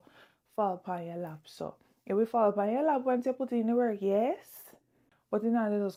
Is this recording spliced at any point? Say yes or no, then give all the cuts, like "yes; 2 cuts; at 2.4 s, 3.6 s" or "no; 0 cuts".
no; 0 cuts